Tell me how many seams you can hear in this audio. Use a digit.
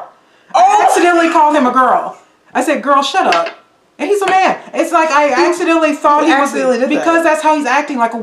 1